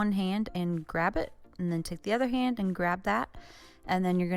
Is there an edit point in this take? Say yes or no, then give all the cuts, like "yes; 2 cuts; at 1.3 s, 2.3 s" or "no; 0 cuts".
yes; 1 cut; at 1.4 s